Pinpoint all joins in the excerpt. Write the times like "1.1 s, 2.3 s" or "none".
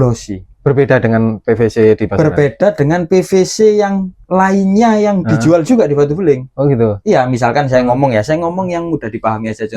none

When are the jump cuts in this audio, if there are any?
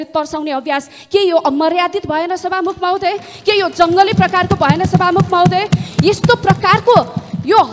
none

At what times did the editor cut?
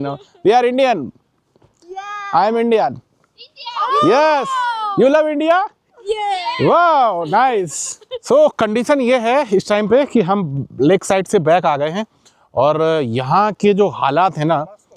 8.2 s

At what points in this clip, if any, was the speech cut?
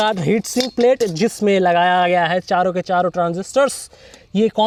none

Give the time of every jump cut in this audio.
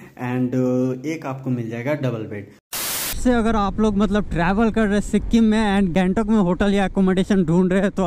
3.0 s, 5.9 s

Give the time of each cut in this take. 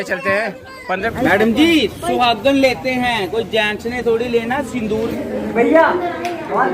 1.1 s, 4.9 s

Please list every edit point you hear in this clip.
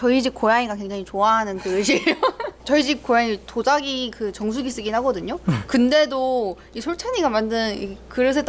none

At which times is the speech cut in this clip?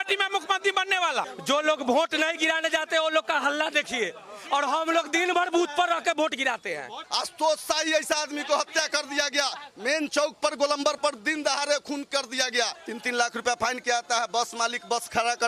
1.3 s, 7.1 s, 12.9 s

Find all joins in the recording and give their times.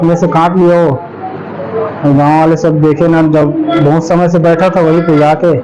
none

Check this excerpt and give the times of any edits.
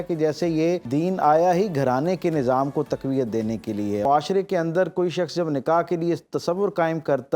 0.8 s, 4.0 s

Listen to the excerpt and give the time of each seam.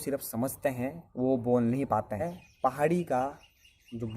2.3 s

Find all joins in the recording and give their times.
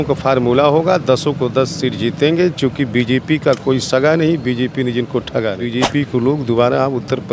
5.6 s

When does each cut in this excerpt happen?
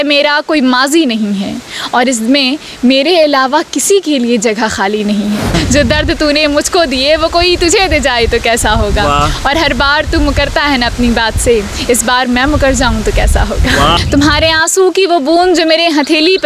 5.5 s, 14.0 s

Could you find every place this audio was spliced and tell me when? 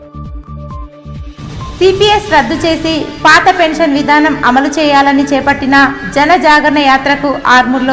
1.7 s

